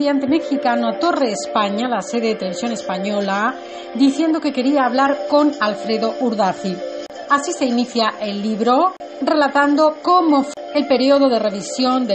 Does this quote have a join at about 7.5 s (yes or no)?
no